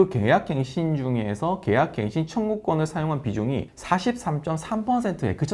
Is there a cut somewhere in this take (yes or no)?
no